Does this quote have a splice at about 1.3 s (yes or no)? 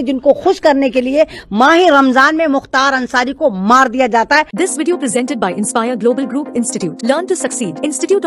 no